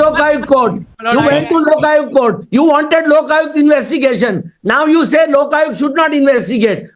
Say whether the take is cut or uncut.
uncut